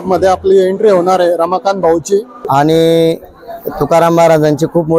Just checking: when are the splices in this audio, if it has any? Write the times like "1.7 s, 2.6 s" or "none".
2.4 s